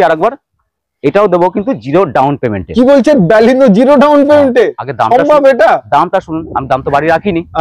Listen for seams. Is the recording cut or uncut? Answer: uncut